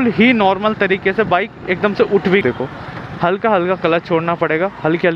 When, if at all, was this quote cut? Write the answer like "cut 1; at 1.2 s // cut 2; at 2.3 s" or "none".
cut 1; at 2.4 s